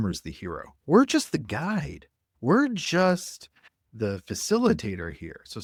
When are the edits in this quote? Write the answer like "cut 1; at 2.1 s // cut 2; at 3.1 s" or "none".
none